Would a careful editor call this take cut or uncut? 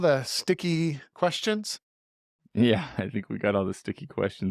cut